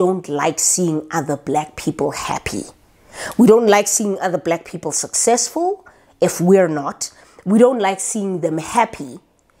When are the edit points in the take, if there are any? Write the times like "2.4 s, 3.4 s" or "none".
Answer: none